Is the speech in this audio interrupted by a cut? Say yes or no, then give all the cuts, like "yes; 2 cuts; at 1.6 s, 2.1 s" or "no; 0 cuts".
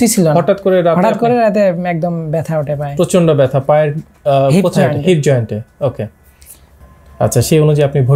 yes; 1 cut; at 6.8 s